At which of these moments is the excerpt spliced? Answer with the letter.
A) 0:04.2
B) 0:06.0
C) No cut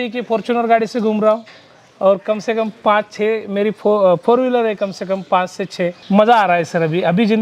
B